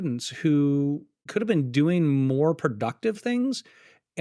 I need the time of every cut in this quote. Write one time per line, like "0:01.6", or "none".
0:01.1